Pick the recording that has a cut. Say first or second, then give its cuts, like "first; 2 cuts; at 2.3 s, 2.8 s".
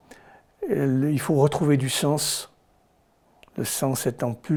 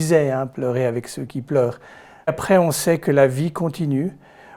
second; 1 cut; at 2.3 s